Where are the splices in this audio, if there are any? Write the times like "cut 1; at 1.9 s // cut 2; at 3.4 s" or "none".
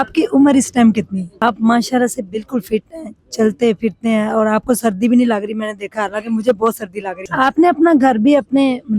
cut 1; at 1.4 s // cut 2; at 7.2 s